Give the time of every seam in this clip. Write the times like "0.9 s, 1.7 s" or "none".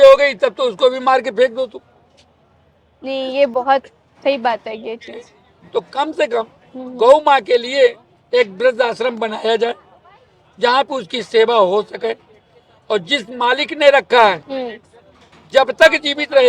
none